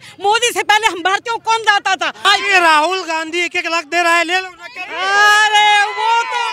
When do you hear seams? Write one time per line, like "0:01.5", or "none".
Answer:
0:02.2

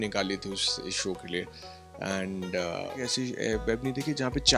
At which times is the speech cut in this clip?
0:03.0

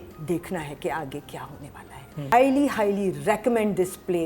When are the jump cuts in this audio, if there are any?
0:02.3

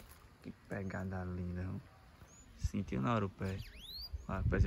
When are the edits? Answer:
none

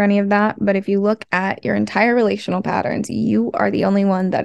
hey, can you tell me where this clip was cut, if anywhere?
none

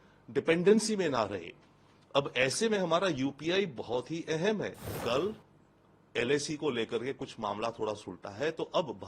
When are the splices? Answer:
0:04.9

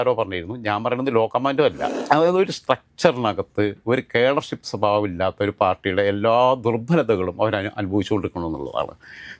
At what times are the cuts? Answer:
0:01.9

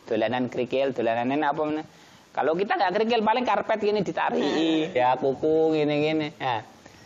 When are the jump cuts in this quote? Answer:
0:05.0

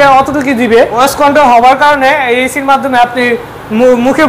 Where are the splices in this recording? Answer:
0:01.0

